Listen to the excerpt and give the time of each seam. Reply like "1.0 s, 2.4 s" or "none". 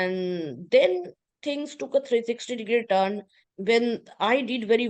none